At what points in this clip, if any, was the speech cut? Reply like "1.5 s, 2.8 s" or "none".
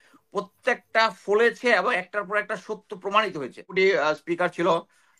3.7 s